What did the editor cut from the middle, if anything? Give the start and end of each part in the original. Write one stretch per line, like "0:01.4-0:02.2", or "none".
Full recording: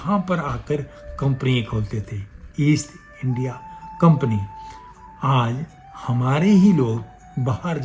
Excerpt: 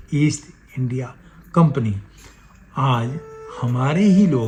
none